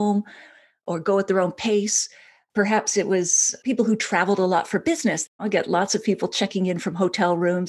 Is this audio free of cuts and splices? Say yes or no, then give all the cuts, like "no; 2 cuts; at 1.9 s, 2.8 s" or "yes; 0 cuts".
no; 1 cut; at 5.3 s